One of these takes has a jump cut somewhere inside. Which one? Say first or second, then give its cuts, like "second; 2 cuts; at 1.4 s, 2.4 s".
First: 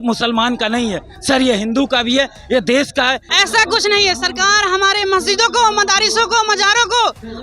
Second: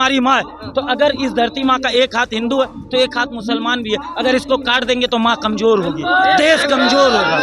first; 1 cut; at 3.2 s